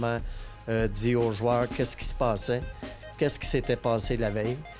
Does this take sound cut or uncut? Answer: uncut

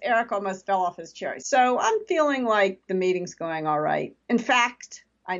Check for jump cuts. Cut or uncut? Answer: cut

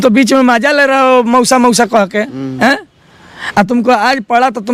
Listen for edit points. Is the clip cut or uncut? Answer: uncut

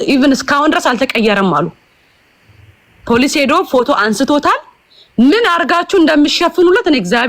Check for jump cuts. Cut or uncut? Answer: uncut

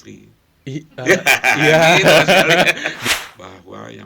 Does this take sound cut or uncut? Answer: cut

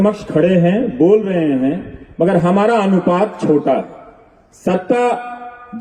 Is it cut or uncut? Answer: uncut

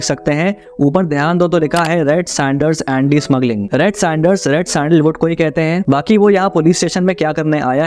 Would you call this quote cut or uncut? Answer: cut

